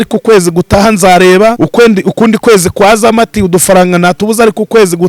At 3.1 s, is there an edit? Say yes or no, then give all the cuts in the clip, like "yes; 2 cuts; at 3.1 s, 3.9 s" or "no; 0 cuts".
no; 1 cut; at 1.6 s